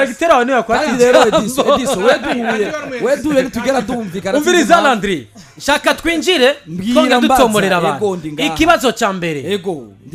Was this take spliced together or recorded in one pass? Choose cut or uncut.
uncut